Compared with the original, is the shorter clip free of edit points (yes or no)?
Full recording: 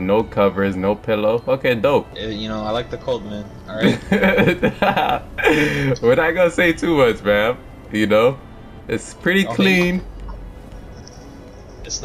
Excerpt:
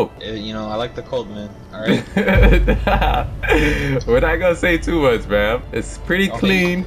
no